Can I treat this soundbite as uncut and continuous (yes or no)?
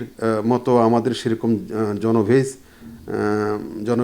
yes